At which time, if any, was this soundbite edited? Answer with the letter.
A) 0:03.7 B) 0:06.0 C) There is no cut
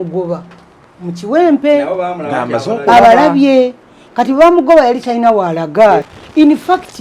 B